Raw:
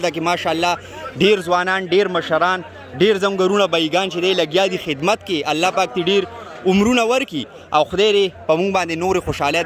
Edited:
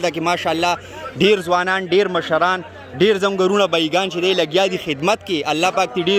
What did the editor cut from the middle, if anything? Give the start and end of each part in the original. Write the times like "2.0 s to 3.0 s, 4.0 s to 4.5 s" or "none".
none

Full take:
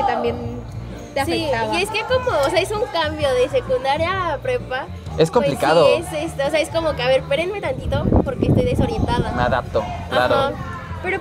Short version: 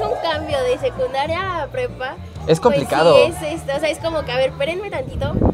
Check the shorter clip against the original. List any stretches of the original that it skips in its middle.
none

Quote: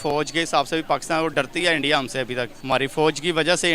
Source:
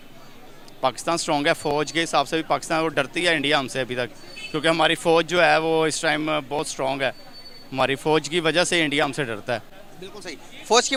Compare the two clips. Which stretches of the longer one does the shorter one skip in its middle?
4.1 s to 7.6 s

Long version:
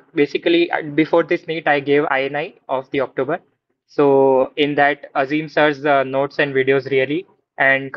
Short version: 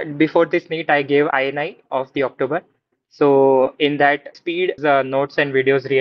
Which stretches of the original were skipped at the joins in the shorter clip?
5.5 s to 5.7 s

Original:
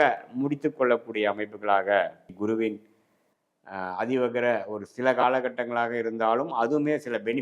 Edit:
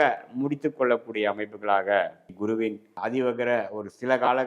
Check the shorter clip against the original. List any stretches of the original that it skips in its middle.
2.9 s to 3.9 s

